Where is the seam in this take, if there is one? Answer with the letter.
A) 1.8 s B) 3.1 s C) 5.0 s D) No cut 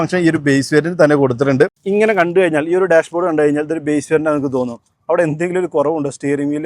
A